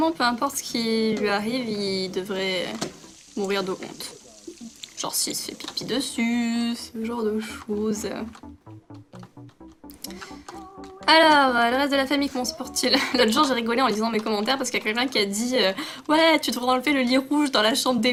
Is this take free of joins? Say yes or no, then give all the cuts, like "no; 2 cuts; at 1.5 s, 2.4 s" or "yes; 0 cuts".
yes; 0 cuts